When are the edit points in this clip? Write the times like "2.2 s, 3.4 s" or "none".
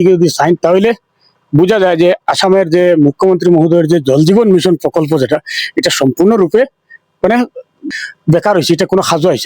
7.8 s